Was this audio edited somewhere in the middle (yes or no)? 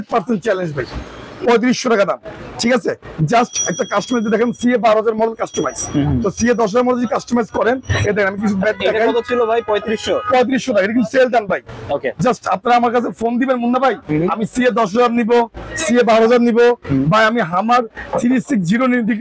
no